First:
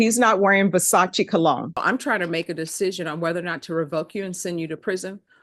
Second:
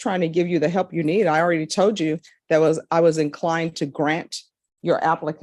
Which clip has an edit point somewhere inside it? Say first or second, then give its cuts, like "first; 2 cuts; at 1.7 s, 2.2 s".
first; 1 cut; at 1.8 s